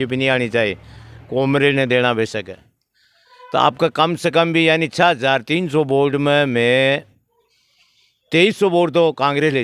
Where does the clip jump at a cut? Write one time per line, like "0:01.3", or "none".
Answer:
none